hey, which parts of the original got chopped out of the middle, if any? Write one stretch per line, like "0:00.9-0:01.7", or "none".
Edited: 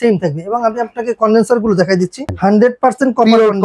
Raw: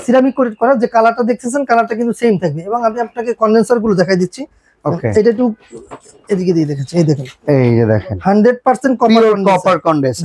0:04.5-0:08.1